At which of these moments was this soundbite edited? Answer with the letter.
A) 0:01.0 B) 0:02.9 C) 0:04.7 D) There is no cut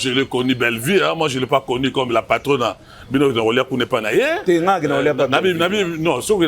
D